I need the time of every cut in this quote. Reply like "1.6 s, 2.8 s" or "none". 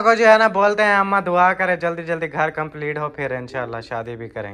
none